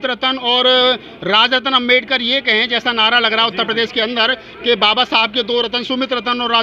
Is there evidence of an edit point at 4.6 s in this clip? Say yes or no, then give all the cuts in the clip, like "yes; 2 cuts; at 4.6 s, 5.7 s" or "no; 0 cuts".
no; 0 cuts